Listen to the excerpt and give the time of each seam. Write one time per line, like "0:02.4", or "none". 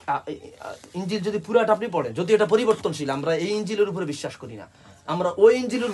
none